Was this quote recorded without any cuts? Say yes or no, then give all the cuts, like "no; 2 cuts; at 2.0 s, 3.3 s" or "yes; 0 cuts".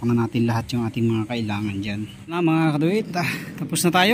no; 1 cut; at 2.2 s